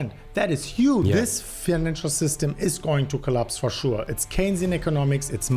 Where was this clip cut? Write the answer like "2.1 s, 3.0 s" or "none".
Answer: 1.0 s